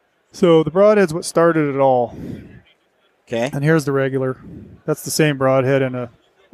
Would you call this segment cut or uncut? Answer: uncut